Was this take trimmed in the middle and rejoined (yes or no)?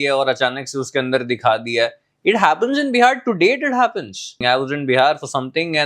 yes